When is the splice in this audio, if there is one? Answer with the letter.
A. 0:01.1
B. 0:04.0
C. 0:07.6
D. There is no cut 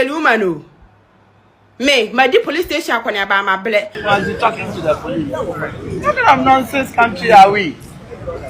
B